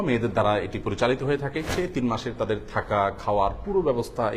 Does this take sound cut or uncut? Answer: cut